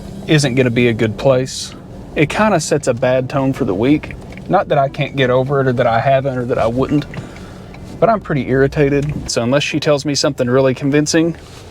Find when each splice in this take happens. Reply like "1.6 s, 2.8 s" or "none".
9.3 s